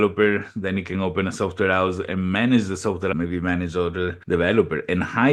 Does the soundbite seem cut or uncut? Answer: cut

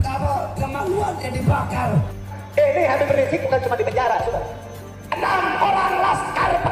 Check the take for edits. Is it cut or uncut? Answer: cut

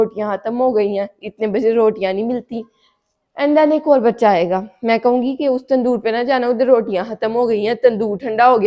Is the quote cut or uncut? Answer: uncut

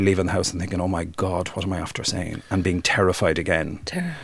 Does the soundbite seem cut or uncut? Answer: uncut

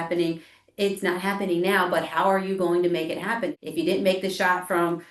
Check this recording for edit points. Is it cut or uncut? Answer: uncut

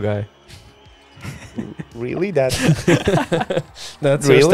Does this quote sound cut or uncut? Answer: uncut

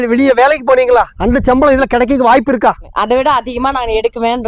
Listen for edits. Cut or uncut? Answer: cut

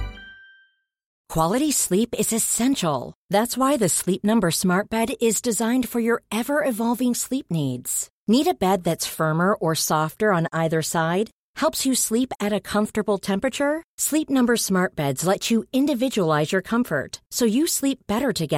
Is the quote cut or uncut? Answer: cut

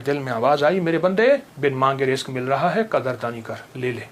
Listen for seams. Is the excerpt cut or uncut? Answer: cut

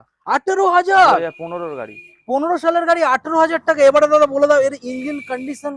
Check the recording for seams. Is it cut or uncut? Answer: uncut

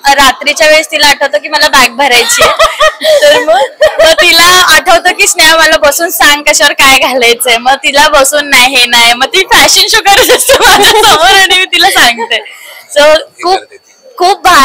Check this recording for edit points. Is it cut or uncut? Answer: uncut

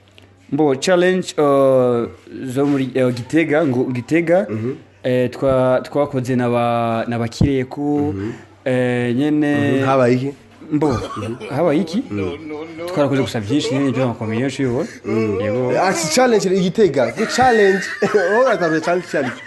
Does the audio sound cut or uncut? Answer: uncut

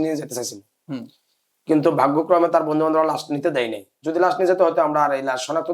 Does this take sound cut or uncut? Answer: uncut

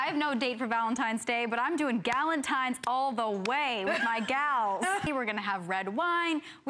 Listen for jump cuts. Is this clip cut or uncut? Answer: cut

